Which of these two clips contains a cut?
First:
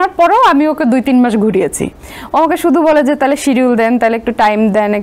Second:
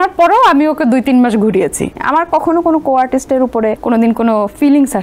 second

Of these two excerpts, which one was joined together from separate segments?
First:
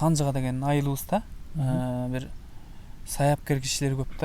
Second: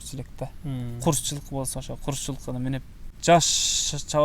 second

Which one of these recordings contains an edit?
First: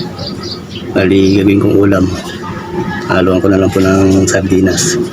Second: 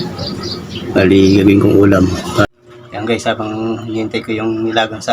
second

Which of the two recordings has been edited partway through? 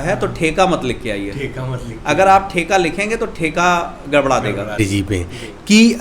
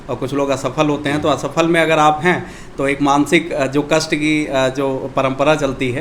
first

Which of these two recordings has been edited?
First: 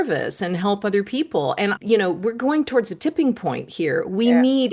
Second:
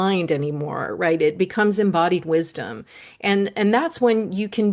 first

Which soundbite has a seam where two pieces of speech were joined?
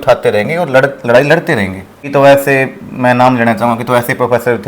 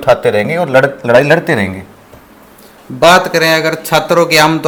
first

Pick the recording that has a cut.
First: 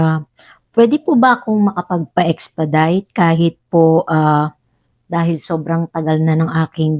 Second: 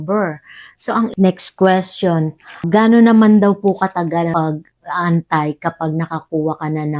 second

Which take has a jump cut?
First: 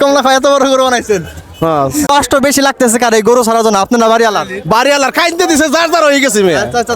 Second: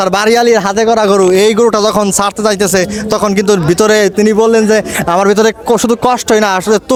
first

